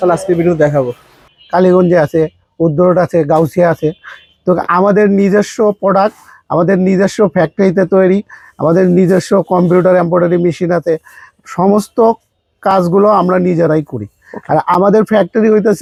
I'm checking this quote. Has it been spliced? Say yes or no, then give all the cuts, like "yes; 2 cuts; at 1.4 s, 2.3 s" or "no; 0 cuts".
no; 0 cuts